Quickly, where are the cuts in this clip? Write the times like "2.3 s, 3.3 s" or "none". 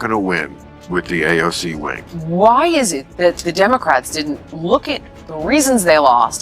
2.0 s